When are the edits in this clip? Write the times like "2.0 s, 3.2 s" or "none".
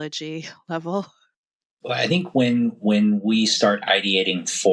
1.8 s